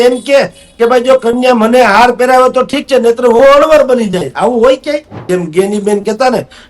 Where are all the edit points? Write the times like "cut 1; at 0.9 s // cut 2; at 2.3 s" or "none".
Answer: cut 1; at 5.2 s